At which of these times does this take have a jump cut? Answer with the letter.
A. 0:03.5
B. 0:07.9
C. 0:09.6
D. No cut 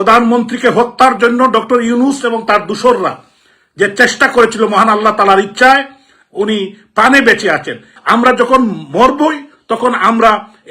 B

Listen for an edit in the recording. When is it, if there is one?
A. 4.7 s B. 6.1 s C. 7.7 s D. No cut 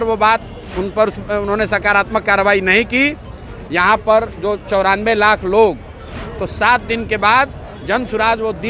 B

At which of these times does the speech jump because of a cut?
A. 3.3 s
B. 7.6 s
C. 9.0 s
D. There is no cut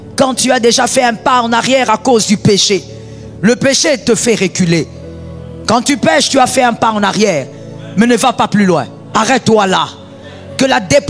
C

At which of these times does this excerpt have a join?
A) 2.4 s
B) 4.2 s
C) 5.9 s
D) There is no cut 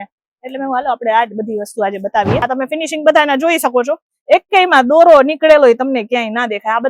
A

